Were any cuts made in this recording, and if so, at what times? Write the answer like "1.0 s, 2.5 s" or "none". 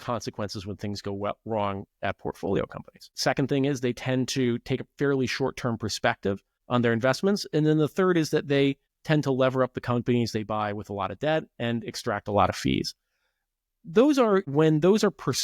6.5 s, 8.9 s